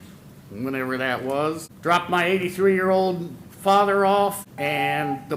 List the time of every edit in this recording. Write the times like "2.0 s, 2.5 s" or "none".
1.7 s, 4.5 s

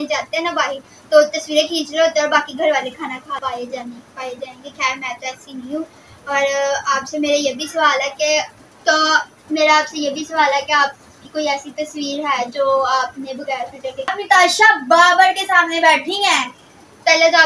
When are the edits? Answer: 3.4 s, 8.6 s, 14.1 s

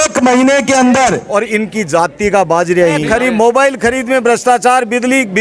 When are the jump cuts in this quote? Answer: 1.2 s, 3.0 s

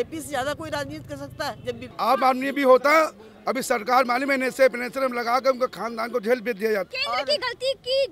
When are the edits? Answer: 1.9 s, 6.9 s

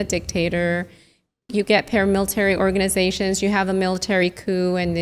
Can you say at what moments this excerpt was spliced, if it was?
1.4 s

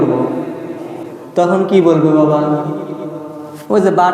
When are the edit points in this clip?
1.1 s

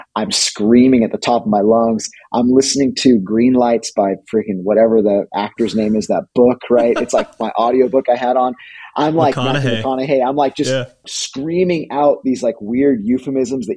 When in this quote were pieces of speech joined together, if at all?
11.1 s

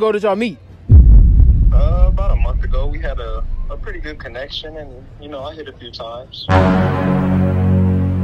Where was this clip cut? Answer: none

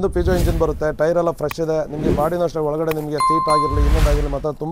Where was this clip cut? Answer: none

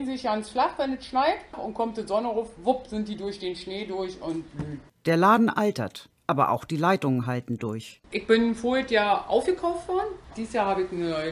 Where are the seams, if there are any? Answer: none

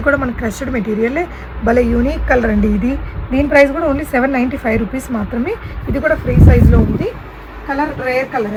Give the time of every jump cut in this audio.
none

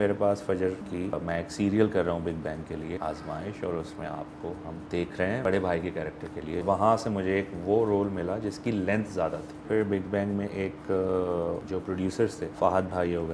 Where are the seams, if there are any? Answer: 1.1 s, 3.0 s, 4.8 s, 5.4 s, 6.6 s, 9.6 s

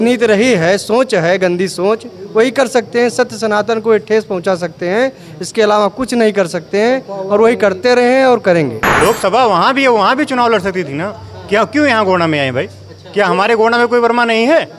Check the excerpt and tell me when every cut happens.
8.8 s

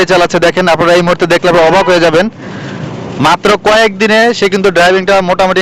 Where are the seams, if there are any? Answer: none

